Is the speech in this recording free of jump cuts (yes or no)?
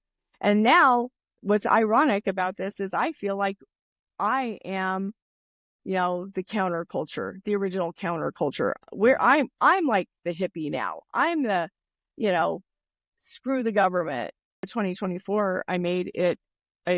no